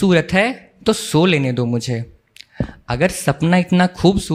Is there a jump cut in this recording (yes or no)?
no